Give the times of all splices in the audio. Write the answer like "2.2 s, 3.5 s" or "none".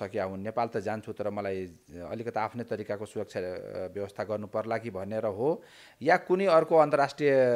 none